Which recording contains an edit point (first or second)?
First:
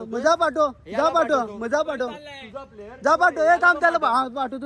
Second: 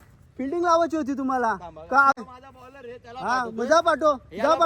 second